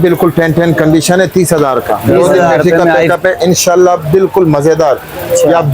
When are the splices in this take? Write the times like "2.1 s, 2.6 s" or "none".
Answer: 3.1 s